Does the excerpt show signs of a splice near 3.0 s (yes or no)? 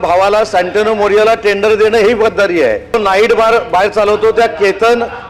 yes